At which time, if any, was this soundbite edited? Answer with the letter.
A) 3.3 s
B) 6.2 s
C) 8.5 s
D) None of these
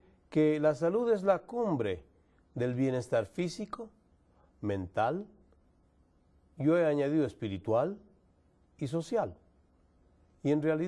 D